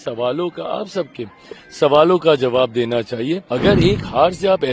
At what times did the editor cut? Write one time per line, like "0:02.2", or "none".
0:03.5